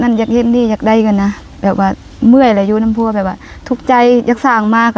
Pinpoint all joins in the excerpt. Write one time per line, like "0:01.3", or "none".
none